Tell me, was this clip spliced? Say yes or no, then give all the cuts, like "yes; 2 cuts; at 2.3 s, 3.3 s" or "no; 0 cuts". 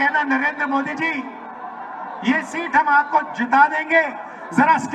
no; 0 cuts